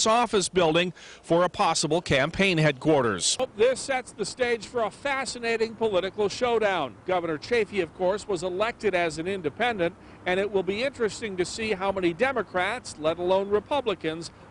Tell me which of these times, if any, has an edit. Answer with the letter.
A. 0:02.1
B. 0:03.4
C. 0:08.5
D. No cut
B